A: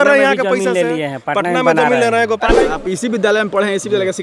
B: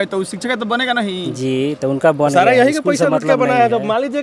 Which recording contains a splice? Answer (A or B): A